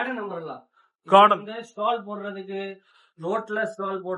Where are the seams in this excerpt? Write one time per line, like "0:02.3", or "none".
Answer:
none